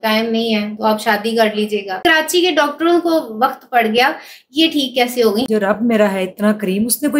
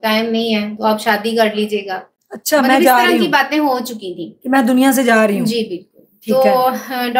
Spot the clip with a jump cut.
first; 2 cuts; at 2.0 s, 5.5 s

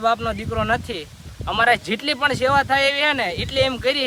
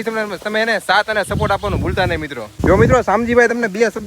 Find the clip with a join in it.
second; 1 cut; at 2.5 s

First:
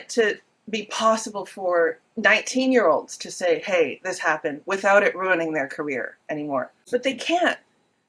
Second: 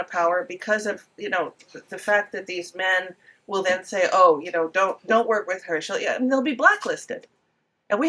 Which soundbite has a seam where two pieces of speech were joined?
first; 1 cut; at 6.8 s

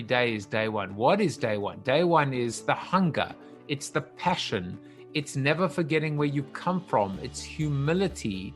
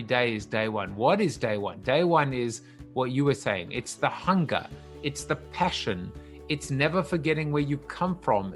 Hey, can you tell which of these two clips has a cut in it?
first; 1 cut; at 2.6 s

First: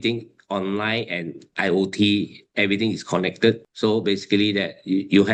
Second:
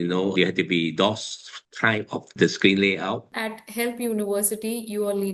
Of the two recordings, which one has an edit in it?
second; 1 cut; at 3.3 s

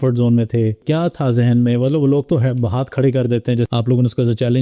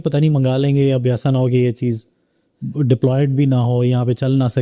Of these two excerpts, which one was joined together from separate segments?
first; 2 cuts; at 0.8 s, 3.7 s

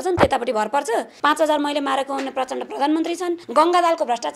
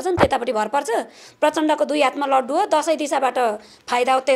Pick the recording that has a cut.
first; 2 cuts; at 1.1 s, 3.4 s

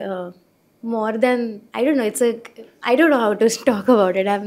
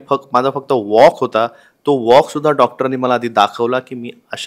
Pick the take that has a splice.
first; 1 cut; at 1.6 s

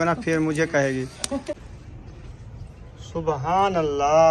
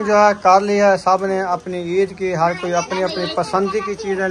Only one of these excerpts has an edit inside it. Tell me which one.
first; 1 cut; at 1.5 s

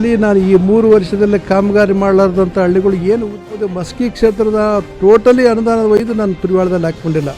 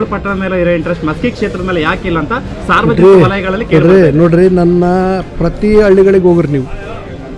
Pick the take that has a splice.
first; 1 cut; at 3.6 s

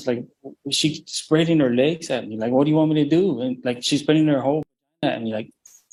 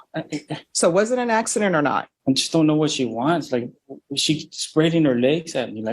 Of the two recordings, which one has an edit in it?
second; 1 cut; at 2.1 s

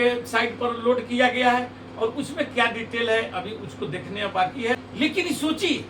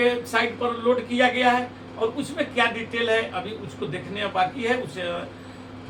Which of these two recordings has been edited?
first; 1 cut; at 4.9 s

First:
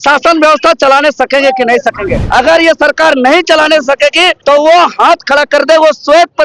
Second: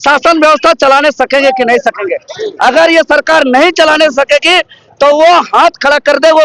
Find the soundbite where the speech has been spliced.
first; 2 cuts; at 2.2 s, 4.4 s

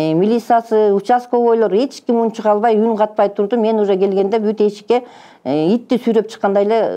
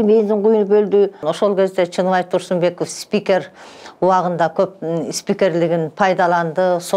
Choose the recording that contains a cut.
second; 1 cut; at 1.3 s

